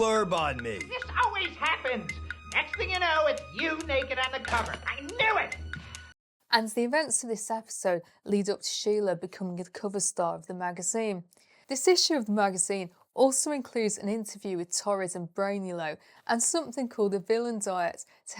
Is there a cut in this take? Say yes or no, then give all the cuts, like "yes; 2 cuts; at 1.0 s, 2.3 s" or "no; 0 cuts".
no; 0 cuts